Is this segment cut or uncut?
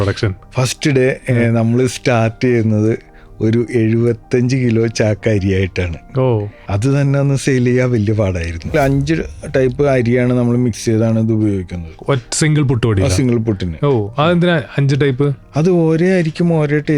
cut